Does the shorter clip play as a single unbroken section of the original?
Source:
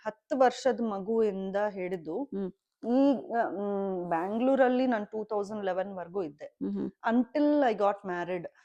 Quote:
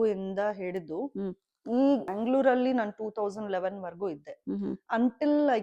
no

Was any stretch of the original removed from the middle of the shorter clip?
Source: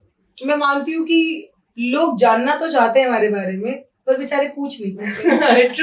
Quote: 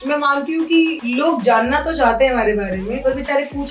yes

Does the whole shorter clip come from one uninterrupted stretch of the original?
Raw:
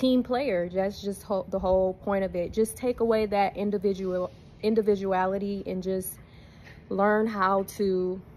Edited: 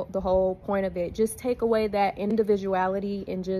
no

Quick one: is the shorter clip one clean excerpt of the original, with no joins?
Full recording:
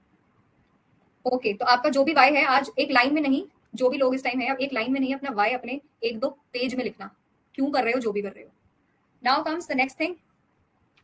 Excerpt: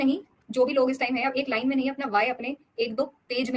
yes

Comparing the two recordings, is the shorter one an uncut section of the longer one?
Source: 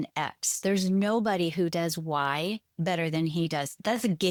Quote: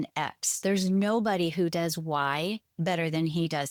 yes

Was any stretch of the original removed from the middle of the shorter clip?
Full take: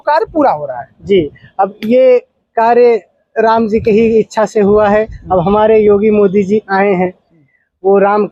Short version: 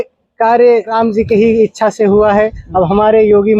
yes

